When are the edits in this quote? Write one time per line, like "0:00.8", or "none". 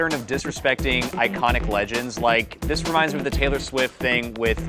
none